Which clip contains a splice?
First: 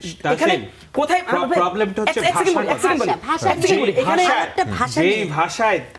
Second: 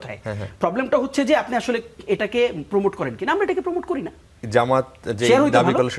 second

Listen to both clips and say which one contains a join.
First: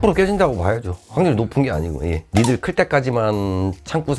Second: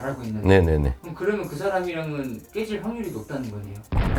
first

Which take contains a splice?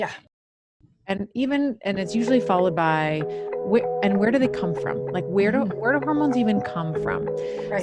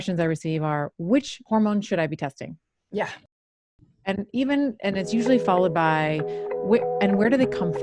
second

